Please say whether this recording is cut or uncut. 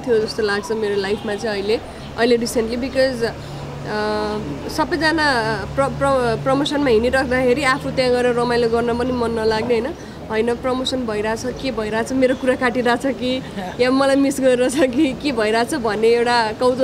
uncut